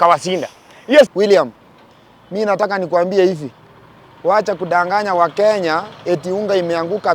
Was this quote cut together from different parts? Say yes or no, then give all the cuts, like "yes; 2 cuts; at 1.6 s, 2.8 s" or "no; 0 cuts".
yes; 1 cut; at 1.1 s